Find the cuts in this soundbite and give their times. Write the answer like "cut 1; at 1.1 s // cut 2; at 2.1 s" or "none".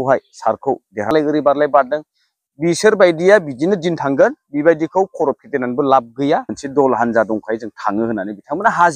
cut 1; at 1.1 s // cut 2; at 6.6 s

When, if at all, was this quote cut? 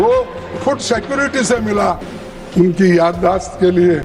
cut 1; at 2.1 s

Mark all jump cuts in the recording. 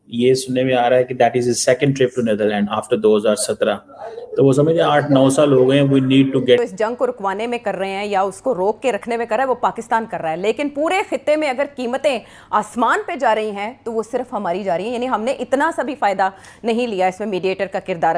cut 1; at 6.6 s

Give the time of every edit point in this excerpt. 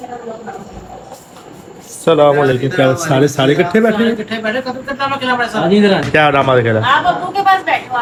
none

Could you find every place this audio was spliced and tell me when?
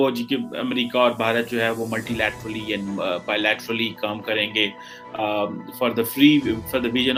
none

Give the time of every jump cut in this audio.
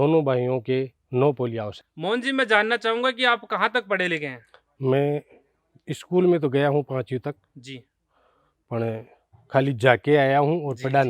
cut 1; at 1.8 s

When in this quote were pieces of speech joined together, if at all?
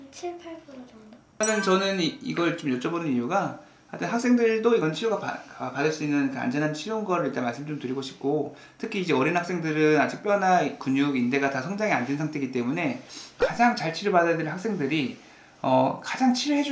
cut 1; at 1.2 s // cut 2; at 13.4 s

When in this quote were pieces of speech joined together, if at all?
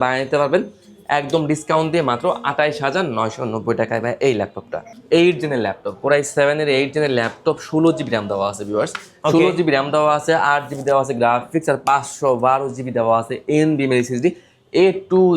cut 1; at 4.8 s

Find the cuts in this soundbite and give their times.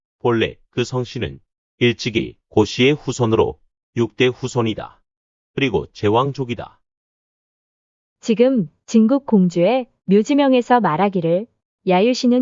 none

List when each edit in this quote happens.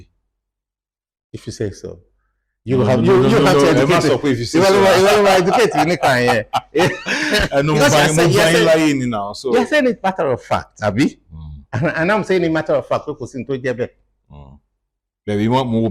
none

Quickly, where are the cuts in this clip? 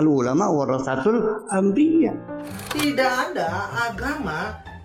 cut 1; at 2.6 s

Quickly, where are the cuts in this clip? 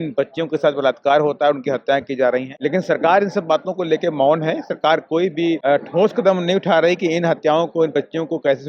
cut 1; at 2.5 s // cut 2; at 5.6 s

